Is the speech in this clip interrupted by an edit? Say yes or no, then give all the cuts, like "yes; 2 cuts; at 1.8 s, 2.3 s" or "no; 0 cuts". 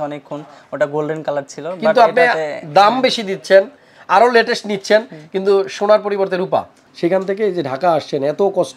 yes; 1 cut; at 6.8 s